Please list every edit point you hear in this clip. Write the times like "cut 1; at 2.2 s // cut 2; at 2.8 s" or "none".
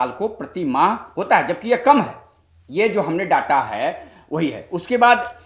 none